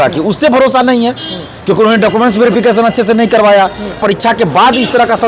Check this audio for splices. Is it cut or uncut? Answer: cut